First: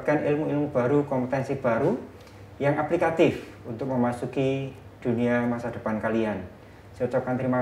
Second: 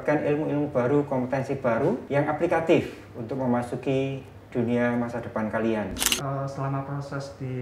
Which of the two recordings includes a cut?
second; 2 cuts; at 2.0 s, 6.1 s

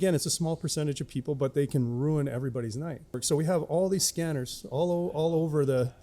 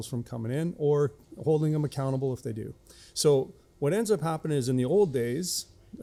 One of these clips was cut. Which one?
first; 1 cut; at 3.2 s

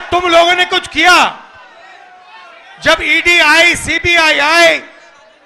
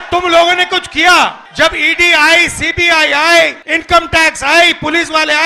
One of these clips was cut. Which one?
second; 2 cuts; at 1.4 s, 3.7 s

